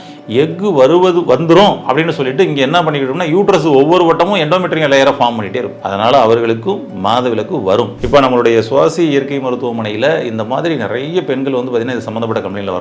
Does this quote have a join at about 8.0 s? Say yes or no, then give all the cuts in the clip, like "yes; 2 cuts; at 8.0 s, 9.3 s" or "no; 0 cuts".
yes; 1 cut; at 8.0 s